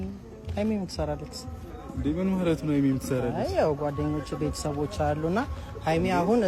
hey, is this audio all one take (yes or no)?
yes